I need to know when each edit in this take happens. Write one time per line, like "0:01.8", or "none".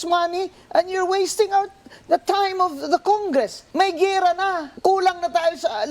0:03.6
0:04.7